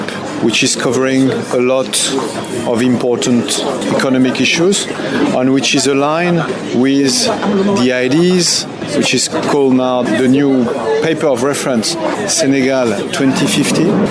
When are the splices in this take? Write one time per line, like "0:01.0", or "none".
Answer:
none

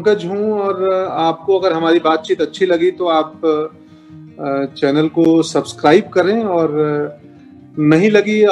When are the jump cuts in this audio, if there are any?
none

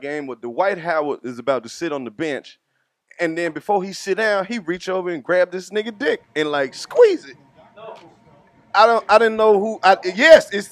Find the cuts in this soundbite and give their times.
none

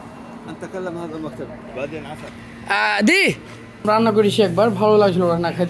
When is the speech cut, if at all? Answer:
0:03.8

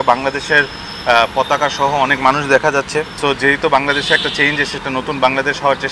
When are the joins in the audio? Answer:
0:03.1
0:04.8

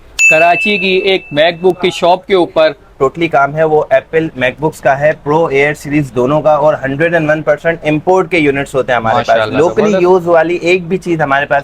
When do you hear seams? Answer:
0:02.9

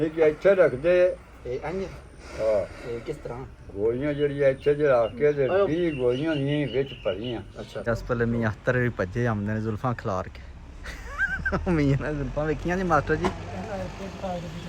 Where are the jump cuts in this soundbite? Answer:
0:07.9

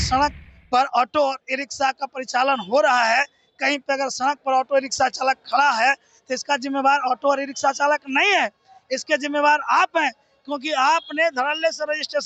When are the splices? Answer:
none

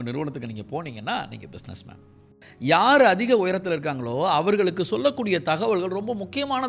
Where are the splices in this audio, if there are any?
0:02.5

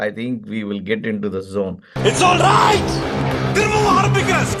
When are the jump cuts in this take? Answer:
none

